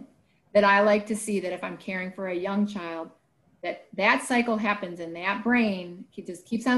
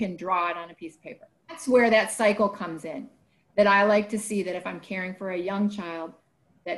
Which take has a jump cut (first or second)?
second